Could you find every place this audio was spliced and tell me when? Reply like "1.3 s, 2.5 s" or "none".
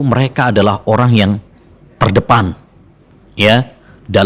none